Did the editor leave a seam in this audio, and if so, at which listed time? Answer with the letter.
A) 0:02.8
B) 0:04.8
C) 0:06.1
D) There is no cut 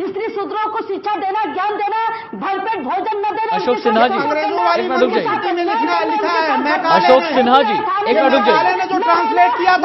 D